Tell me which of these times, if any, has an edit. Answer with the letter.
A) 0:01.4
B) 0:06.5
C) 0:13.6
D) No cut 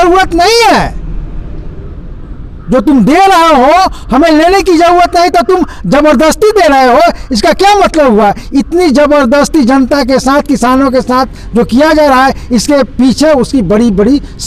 D